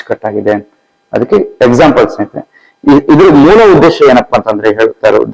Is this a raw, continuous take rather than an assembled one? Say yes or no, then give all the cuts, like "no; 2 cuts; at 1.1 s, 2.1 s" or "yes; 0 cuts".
yes; 0 cuts